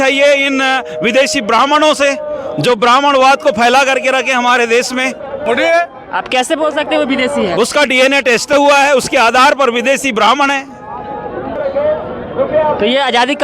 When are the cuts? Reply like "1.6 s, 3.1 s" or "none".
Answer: 5.4 s, 11.5 s